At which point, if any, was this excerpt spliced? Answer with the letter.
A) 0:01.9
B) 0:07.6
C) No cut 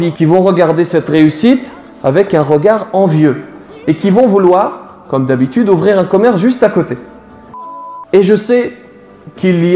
B